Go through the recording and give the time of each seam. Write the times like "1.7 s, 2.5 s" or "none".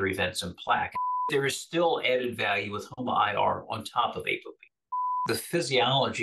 0.9 s, 5.2 s